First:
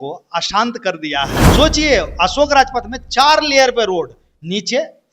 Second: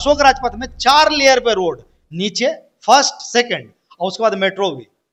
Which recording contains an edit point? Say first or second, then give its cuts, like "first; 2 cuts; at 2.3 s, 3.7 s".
first; 1 cut; at 1.4 s